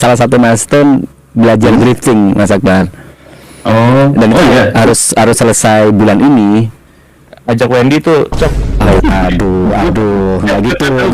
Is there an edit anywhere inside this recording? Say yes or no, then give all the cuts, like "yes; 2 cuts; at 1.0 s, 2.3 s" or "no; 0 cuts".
yes; 1 cut; at 9.0 s